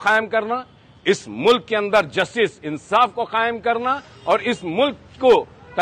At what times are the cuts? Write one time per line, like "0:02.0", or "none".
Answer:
none